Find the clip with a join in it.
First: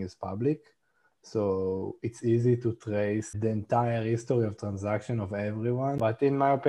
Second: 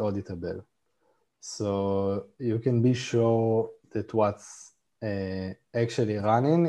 first; 2 cuts; at 3.3 s, 6.0 s

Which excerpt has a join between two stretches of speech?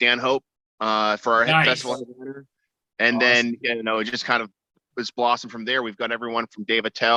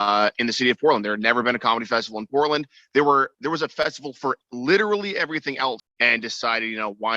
second; 1 cut; at 5.9 s

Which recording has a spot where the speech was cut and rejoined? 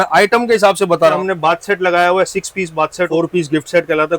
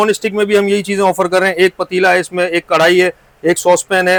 first; 2 cuts; at 1.1 s, 3.1 s

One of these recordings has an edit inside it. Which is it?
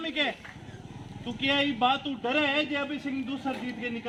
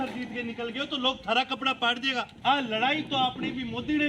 second; 1 cut; at 2.3 s

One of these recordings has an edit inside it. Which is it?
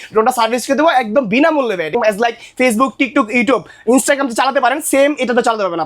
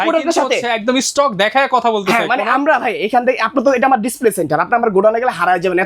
first; 1 cut; at 1.9 s

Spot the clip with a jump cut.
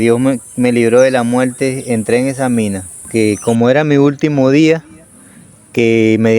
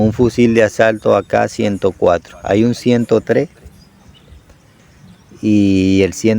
first; 1 cut; at 3.1 s

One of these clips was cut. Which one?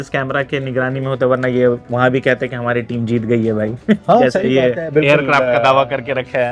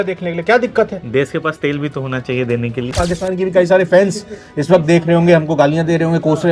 second; 1 cut; at 3.0 s

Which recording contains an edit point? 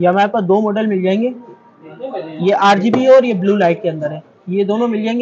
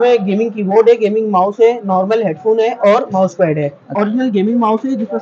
second; 1 cut; at 3.9 s

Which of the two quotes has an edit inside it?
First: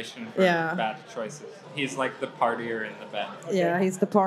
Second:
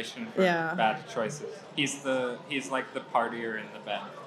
first; 2 cuts; at 1.7 s, 3.4 s

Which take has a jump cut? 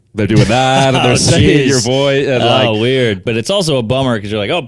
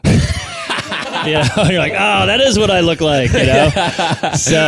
first; 1 cut; at 3.2 s

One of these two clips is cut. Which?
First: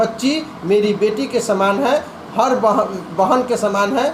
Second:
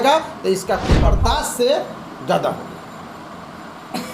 second; 1 cut; at 1.1 s

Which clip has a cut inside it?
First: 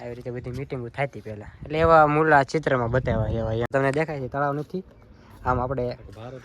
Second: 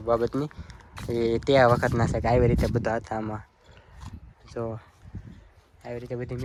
first; 1 cut; at 3.7 s

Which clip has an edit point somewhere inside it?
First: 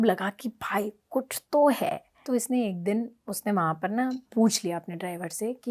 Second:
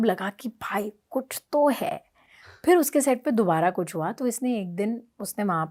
first; 1 cut; at 2.2 s

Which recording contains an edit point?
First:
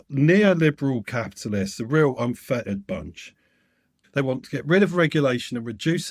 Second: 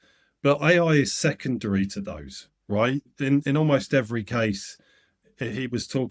first; 1 cut; at 4.0 s

